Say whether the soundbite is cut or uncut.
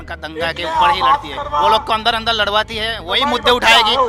uncut